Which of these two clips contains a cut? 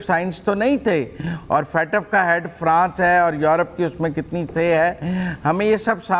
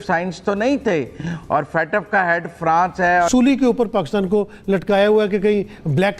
second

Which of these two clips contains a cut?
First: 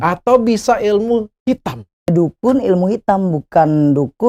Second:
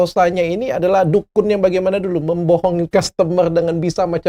first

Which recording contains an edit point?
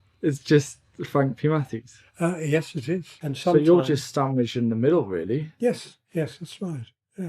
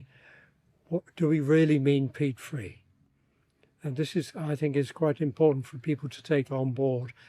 first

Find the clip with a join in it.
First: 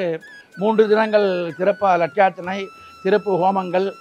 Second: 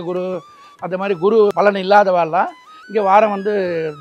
second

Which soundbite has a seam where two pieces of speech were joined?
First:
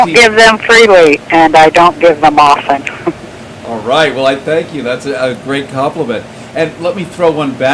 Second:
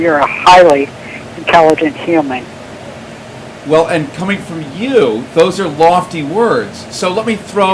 first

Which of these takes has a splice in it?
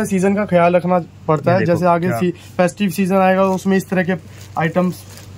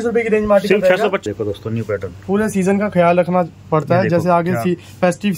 second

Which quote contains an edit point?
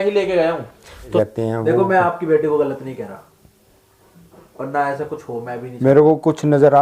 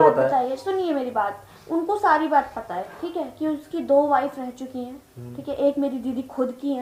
first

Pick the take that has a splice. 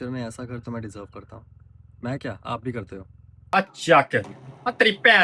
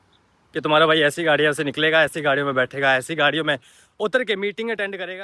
first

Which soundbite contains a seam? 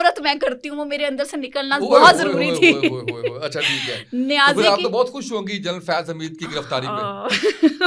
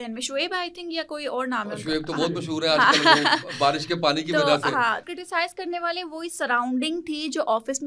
second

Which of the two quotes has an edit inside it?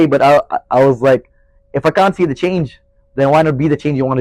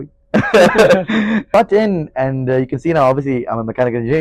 second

